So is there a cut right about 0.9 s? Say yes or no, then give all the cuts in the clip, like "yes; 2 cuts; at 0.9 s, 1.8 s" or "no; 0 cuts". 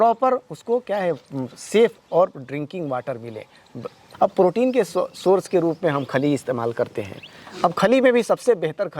no; 1 cut; at 4.1 s